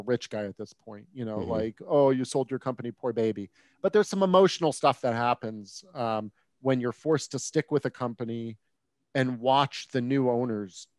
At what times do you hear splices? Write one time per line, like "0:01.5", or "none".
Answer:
none